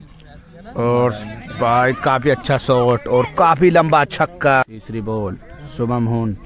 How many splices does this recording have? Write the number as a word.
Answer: one